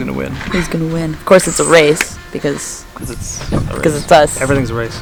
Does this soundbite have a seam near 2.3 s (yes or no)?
no